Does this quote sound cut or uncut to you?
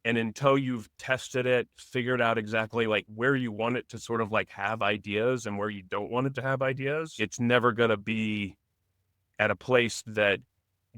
cut